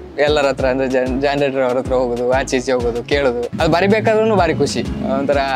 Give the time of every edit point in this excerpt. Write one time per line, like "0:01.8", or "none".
0:03.5